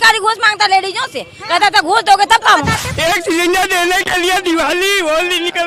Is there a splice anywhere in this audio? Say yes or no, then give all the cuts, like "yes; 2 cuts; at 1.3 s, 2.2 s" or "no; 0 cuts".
yes; 1 cut; at 2.8 s